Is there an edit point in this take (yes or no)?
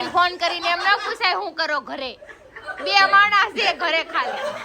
yes